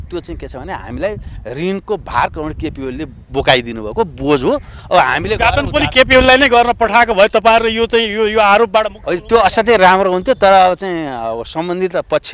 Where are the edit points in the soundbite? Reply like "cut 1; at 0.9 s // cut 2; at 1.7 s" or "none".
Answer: none